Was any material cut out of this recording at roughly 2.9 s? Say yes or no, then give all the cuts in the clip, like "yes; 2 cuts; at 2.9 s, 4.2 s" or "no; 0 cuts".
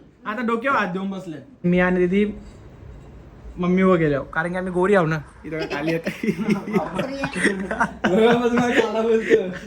no; 1 cut; at 1.6 s